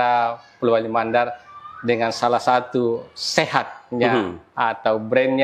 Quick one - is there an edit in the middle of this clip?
no; 0 cuts

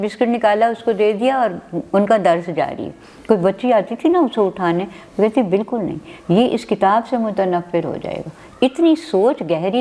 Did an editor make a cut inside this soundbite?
no; 0 cuts

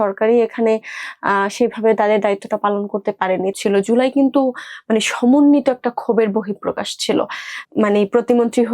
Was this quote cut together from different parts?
yes; 2 cuts; at 3.5 s, 7.5 s

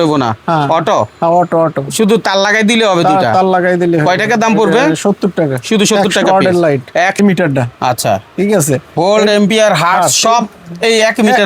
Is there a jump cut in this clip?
yes; 1 cut; at 7.2 s

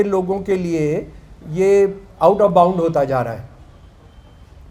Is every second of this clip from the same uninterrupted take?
yes; 0 cuts

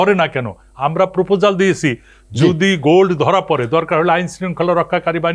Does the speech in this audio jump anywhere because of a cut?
no; 0 cuts

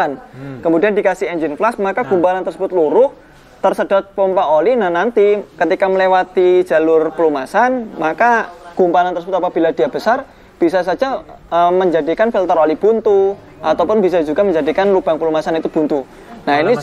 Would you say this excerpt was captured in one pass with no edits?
yes; 0 cuts

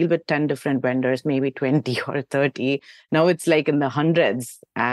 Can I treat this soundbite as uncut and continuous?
yes; 0 cuts

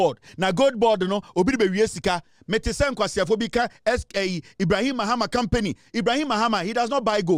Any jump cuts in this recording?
no; 0 cuts

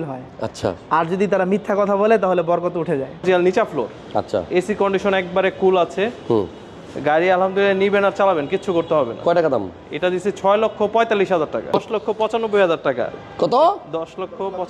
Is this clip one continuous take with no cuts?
no; 2 cuts; at 3.2 s, 11.7 s

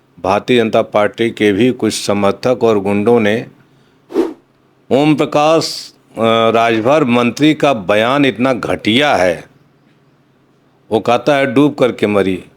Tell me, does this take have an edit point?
yes; 1 cut; at 4.2 s

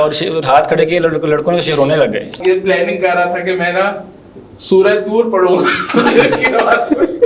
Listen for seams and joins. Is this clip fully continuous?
no; 1 cut; at 2.4 s

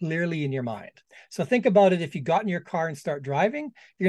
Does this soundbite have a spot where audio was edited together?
no; 0 cuts

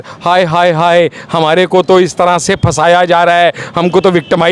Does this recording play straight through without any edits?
yes; 0 cuts

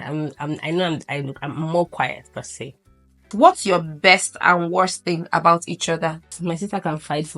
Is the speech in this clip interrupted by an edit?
yes; 2 cuts; at 3.3 s, 6.4 s

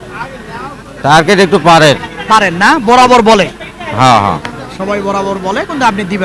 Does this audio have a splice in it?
no; 0 cuts

